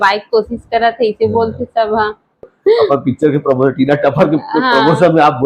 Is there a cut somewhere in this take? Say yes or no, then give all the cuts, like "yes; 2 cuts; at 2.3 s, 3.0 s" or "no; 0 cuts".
yes; 1 cut; at 2.5 s